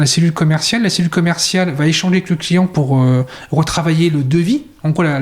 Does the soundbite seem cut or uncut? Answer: uncut